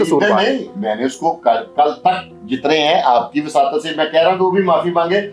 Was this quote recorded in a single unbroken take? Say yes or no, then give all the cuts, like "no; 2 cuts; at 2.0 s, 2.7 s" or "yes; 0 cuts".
yes; 0 cuts